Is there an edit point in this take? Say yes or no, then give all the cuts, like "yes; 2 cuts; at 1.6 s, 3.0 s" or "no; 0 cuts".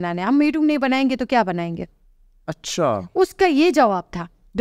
no; 0 cuts